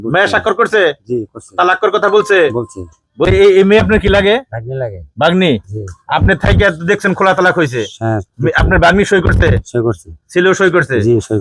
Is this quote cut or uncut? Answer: cut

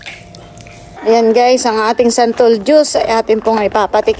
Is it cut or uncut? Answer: cut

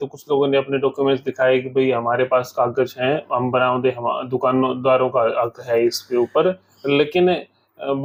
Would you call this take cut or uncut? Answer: uncut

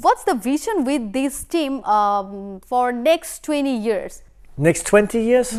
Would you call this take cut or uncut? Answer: uncut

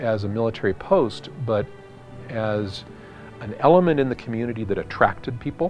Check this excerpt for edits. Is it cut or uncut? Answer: uncut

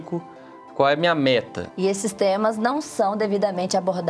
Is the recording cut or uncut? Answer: cut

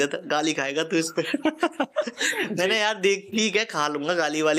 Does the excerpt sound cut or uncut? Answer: uncut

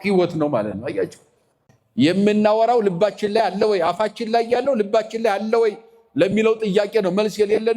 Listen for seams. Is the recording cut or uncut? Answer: cut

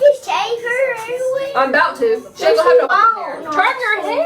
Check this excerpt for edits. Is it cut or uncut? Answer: cut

